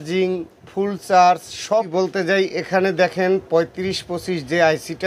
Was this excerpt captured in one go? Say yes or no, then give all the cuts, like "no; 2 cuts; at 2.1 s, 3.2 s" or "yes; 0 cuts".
no; 1 cut; at 1.9 s